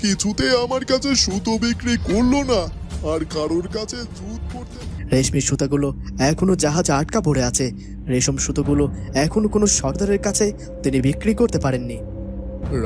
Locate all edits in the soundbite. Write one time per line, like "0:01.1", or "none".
0:04.7